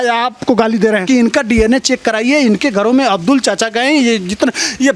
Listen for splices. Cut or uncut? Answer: cut